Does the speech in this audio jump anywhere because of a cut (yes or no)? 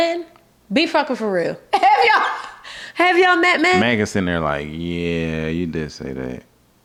no